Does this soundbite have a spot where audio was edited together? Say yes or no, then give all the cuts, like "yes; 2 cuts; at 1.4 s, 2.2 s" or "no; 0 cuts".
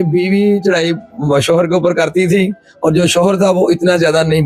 no; 0 cuts